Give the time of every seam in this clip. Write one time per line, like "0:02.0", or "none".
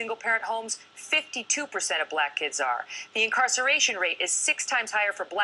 0:03.0